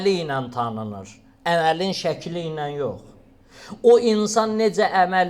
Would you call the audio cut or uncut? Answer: uncut